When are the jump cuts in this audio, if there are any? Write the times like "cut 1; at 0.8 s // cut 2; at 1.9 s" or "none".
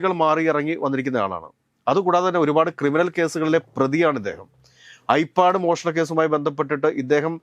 none